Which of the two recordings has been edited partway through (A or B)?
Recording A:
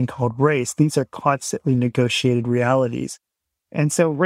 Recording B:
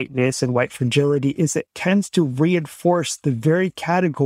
A